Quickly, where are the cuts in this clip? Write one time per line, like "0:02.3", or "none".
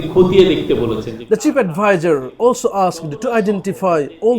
0:01.1